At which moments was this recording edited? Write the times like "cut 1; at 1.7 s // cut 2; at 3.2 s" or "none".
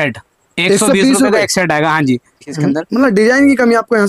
cut 1; at 2.5 s